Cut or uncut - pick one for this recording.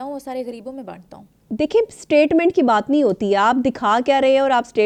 uncut